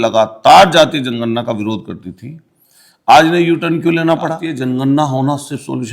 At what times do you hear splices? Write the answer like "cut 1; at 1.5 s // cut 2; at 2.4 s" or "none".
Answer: cut 1; at 4.5 s

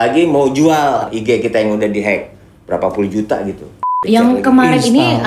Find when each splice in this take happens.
cut 1; at 3.9 s

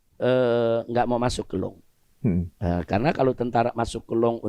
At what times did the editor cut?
none

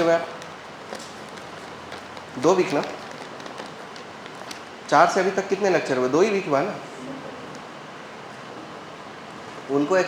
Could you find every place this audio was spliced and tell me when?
cut 1; at 8.5 s

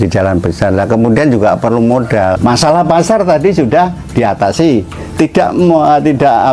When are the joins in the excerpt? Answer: cut 1; at 2.4 s

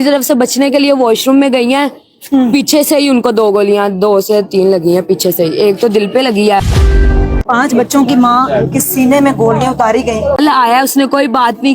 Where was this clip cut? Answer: cut 1; at 6.9 s // cut 2; at 10.4 s

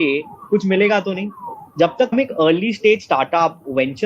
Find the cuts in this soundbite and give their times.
cut 1; at 2.1 s

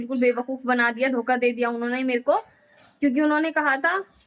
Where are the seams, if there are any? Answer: none

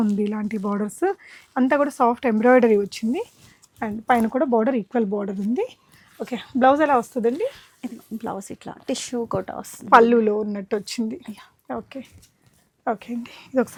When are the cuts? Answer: none

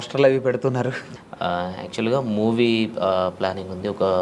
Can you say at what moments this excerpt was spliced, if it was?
cut 1; at 1.1 s

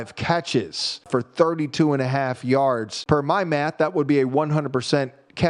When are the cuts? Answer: cut 1; at 1.1 s // cut 2; at 2.9 s

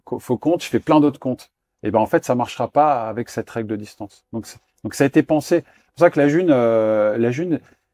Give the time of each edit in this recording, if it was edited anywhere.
none

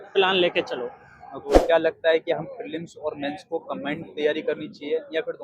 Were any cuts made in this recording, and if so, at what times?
cut 1; at 1.4 s

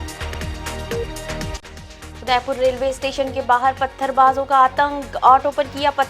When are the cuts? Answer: cut 1; at 1.6 s

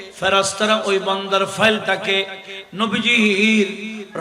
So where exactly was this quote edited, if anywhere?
none

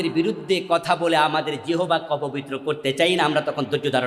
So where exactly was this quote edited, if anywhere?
none

